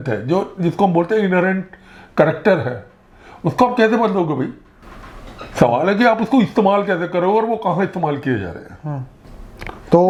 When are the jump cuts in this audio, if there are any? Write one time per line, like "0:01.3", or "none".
none